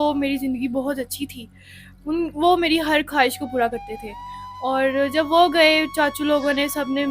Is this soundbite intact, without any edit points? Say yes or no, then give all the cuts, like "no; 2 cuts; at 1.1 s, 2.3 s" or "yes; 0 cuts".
yes; 0 cuts